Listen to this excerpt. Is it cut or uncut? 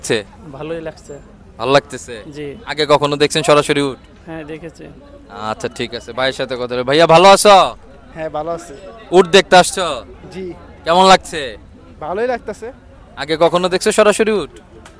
uncut